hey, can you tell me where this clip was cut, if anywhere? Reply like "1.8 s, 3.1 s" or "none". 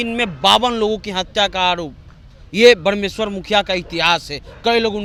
none